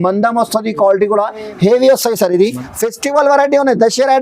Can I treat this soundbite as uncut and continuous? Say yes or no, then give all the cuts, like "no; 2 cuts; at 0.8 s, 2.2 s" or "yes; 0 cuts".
no; 1 cut; at 2.6 s